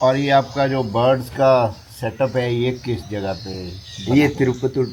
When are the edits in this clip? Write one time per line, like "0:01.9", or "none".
none